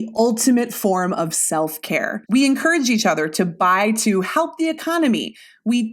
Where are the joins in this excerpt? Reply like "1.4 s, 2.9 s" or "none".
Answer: 2.2 s

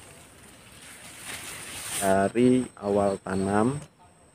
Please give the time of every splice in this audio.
2.1 s

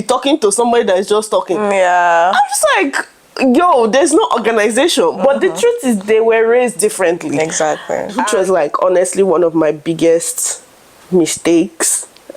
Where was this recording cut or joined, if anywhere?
8.2 s

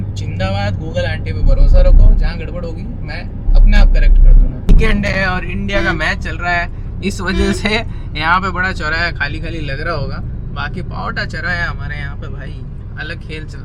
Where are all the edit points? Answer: 4.7 s

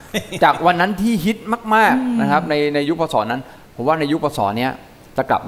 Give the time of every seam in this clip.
none

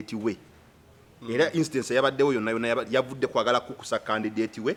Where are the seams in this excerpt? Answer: none

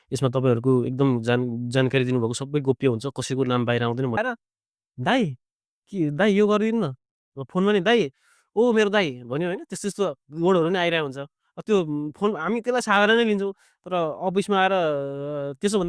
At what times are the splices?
4.2 s

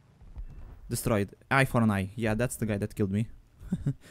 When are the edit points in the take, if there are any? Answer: none

